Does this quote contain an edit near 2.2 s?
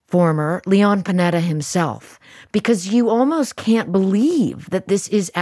no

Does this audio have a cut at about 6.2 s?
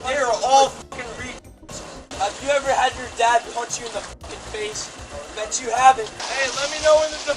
yes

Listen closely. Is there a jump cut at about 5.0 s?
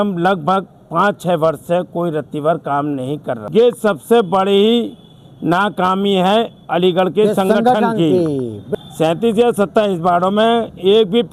no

